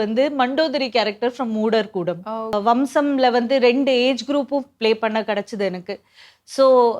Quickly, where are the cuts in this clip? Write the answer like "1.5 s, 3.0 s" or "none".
2.6 s